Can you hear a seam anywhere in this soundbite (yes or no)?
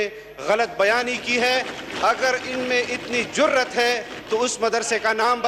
no